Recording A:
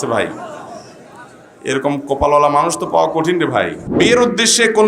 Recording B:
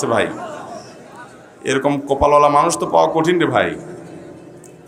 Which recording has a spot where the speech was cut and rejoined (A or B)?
A